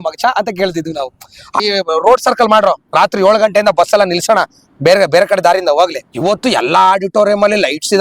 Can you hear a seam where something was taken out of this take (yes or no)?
yes